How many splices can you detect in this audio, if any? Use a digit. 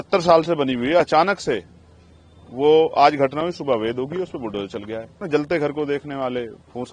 1